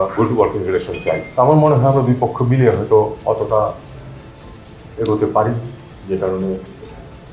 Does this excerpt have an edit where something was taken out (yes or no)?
yes